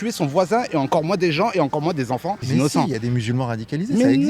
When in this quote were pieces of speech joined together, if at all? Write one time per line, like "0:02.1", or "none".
0:02.4